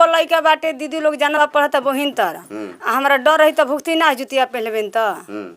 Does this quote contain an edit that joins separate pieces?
yes; 1 cut; at 1.4 s

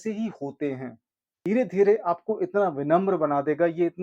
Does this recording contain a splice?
yes; 1 cut; at 1.4 s

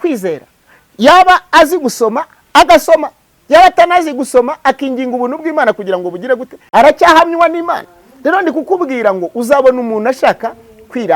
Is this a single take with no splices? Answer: no; 1 cut; at 6.6 s

